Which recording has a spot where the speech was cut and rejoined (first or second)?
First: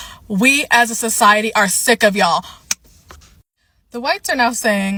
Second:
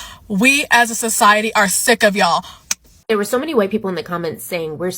second